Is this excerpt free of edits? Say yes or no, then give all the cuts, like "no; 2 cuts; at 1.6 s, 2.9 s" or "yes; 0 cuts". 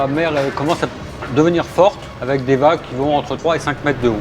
no; 2 cuts; at 2.1 s, 3.3 s